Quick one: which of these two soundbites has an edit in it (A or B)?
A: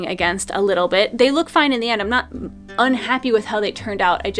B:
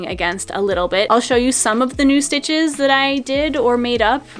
B